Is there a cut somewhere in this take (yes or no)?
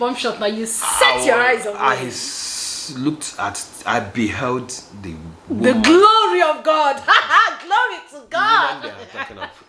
no